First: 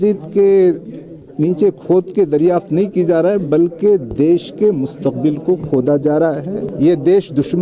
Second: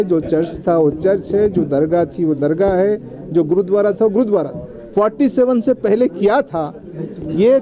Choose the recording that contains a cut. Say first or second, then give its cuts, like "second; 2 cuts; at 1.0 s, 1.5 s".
first; 1 cut; at 6.6 s